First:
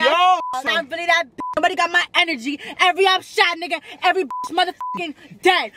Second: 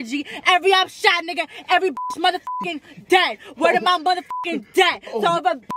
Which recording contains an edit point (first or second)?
first